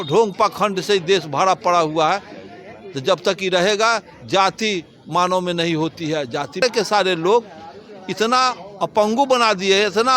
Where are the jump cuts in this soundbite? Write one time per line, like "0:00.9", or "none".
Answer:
0:06.6

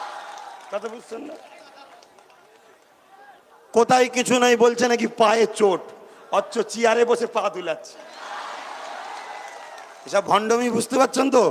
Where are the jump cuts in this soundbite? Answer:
none

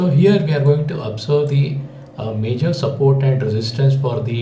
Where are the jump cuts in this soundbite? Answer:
none

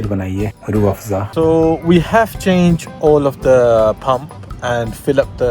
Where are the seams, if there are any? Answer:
0:01.1

